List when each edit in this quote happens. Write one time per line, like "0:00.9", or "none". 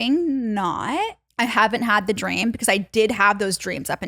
0:01.2